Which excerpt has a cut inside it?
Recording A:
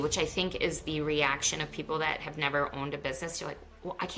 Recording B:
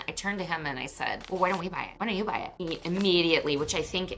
B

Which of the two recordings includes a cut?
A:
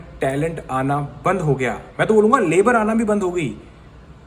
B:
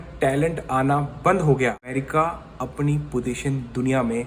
B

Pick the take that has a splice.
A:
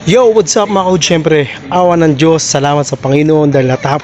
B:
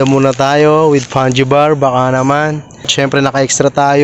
B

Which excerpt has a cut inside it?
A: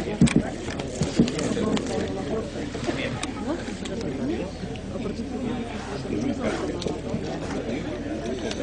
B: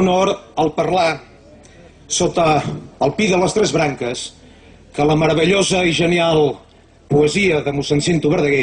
B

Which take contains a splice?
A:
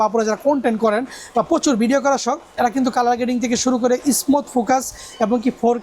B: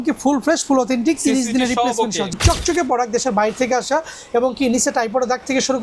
B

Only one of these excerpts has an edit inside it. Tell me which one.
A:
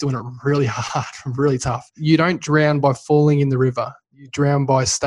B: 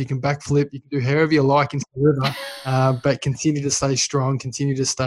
A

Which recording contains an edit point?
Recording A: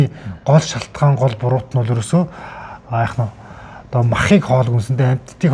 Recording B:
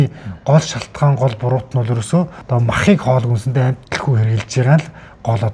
B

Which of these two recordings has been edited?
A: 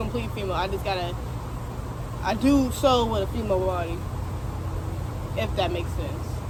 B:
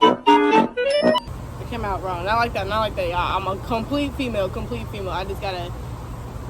B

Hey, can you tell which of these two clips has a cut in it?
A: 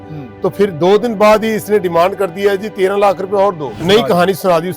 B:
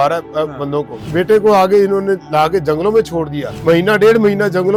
A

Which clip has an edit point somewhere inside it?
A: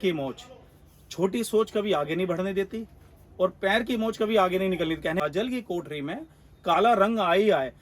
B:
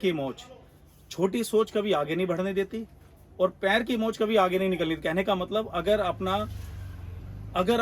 A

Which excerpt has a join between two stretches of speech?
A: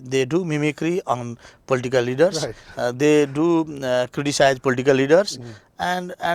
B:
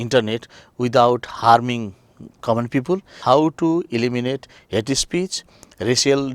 B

